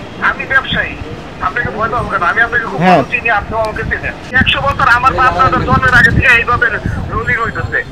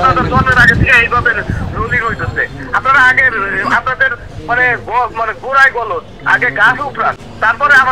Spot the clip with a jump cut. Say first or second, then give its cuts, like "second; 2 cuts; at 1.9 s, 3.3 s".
first; 1 cut; at 4.3 s